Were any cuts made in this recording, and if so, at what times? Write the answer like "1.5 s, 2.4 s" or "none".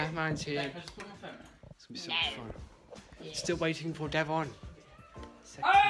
none